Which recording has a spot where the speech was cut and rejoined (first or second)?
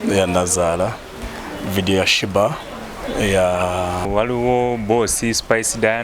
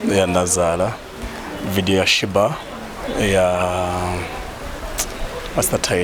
first